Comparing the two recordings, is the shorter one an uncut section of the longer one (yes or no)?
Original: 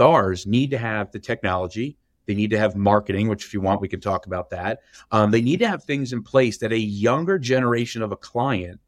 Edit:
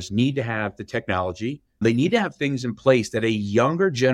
no